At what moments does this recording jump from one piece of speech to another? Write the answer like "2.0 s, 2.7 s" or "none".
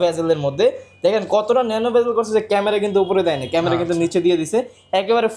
none